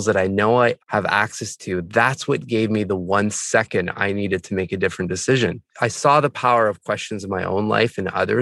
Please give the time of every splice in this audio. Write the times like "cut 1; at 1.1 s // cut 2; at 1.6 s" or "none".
cut 1; at 5.7 s